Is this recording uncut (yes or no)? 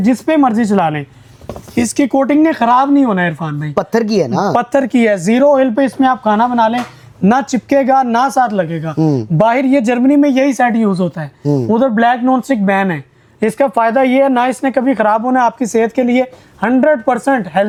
yes